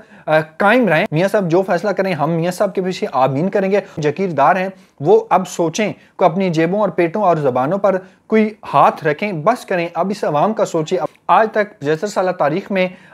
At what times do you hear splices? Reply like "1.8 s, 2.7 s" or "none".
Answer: 1.1 s, 3.9 s, 11.0 s